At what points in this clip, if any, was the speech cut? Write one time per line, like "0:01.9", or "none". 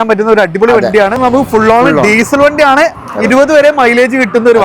0:01.2